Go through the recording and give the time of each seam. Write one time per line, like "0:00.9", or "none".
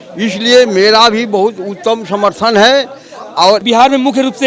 0:03.4